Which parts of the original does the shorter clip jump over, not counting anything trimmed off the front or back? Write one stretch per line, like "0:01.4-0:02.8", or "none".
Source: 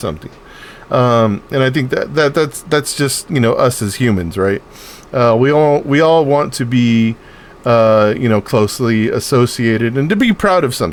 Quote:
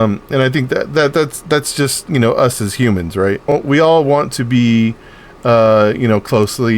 0:04.7-0:05.7